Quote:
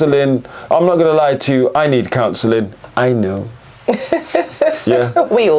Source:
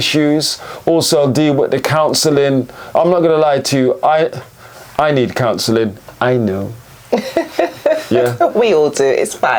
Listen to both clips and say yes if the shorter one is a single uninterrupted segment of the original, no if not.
no